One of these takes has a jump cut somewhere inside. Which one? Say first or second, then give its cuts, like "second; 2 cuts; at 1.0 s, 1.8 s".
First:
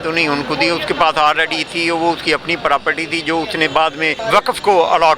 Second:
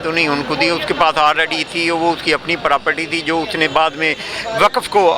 first; 1 cut; at 4.2 s